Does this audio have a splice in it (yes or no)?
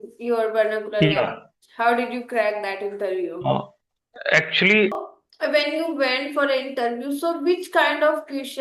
yes